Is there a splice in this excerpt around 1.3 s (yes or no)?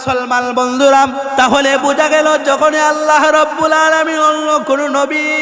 yes